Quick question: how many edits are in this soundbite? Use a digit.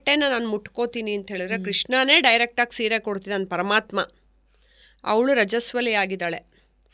0